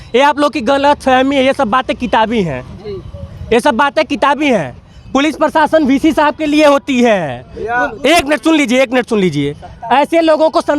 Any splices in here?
no; 0 cuts

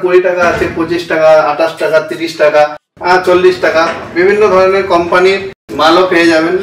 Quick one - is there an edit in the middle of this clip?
no; 0 cuts

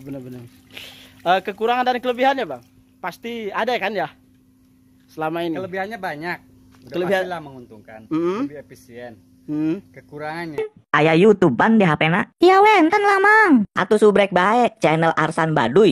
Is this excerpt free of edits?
no; 1 cut; at 10.5 s

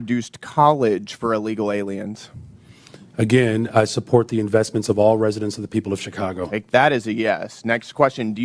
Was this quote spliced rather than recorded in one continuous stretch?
no; 0 cuts

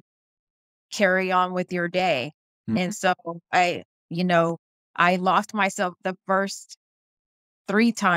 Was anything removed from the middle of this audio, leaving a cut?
no; 0 cuts

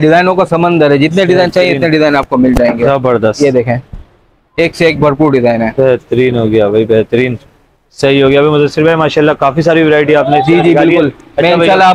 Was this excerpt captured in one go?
yes; 0 cuts

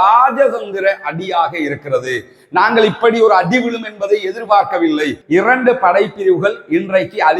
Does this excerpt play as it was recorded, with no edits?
no; 1 cut; at 5.2 s

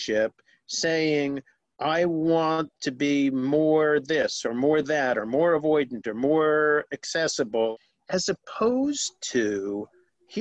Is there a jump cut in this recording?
yes; 1 cut; at 7.7 s

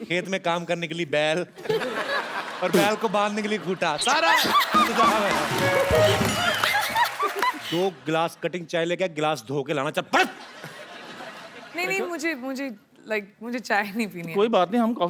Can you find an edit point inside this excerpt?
yes; 1 cut; at 7.6 s

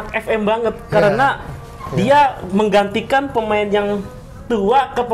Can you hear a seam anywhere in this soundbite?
no; 0 cuts

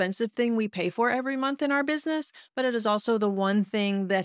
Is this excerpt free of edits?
yes; 0 cuts

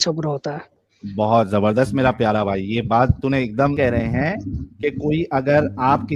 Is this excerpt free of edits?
no; 1 cut; at 3.8 s

